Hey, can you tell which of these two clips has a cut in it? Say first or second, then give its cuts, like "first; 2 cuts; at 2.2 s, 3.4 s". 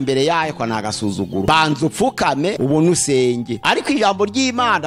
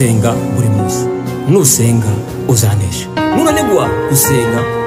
first; 3 cuts; at 1.4 s, 2.6 s, 3.5 s